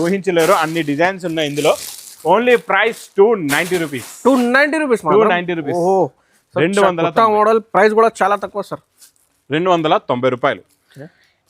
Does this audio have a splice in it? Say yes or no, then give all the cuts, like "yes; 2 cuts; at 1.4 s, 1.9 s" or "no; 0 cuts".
no; 0 cuts